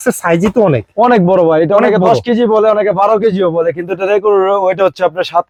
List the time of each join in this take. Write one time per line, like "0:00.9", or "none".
none

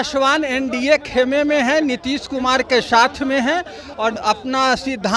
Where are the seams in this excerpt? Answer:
0:04.2

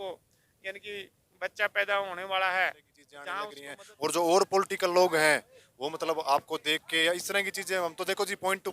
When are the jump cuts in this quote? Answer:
0:03.5

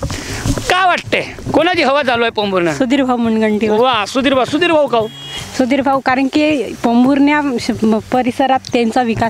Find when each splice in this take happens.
none

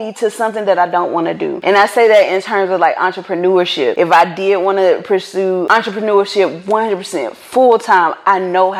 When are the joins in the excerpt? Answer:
0:01.6
0:03.9
0:05.6

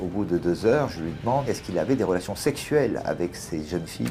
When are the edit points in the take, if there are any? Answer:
0:01.5

